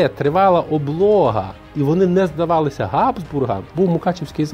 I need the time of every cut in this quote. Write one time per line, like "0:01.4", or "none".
0:03.6